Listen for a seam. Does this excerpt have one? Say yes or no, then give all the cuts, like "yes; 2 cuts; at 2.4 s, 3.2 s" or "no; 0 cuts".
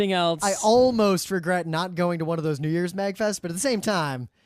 yes; 1 cut; at 3.4 s